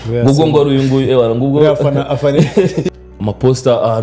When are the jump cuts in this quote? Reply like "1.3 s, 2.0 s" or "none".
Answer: 3.0 s